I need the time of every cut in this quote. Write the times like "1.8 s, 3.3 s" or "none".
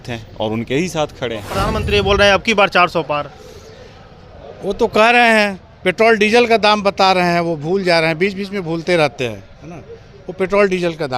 1.7 s

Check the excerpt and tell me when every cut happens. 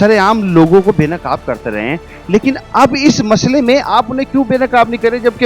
none

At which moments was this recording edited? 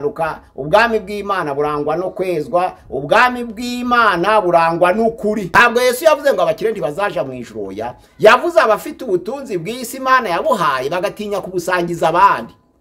5.5 s

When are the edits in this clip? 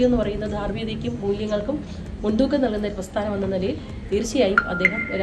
3.3 s

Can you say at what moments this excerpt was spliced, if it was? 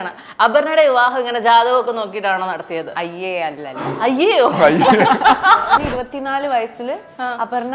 5.9 s

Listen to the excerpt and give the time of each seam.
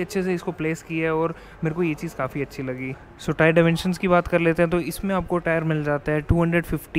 none

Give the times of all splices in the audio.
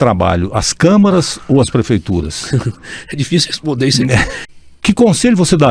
4.4 s

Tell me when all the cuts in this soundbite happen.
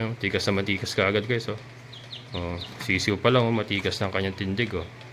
none

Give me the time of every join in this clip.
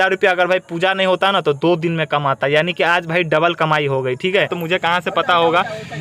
4.6 s

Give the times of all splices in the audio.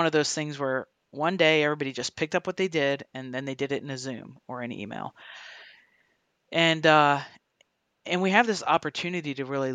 none

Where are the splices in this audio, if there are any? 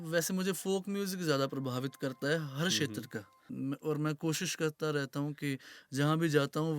3.5 s

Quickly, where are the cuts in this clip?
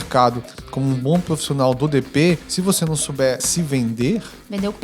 2.5 s, 3.5 s

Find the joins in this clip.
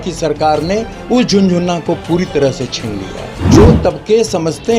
3.6 s

